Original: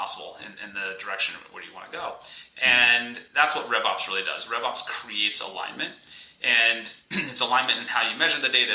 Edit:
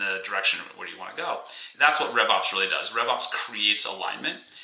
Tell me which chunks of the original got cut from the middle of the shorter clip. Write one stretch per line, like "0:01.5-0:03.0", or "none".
0:02.4-0:03.2